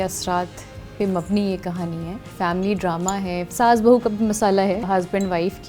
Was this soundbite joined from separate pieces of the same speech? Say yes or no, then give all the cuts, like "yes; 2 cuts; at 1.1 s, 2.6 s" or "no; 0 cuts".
yes; 3 cuts; at 2.2 s, 3.5 s, 4.8 s